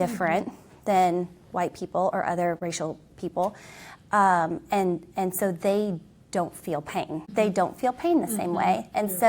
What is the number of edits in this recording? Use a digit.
2